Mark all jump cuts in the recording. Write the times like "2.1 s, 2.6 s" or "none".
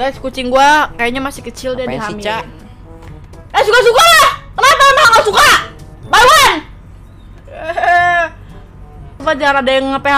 9.2 s